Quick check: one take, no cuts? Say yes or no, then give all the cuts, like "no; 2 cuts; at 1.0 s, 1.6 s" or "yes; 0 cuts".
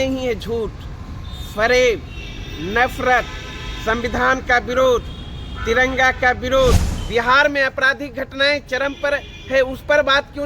no; 1 cut; at 6.9 s